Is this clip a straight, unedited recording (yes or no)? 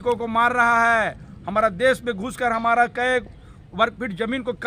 yes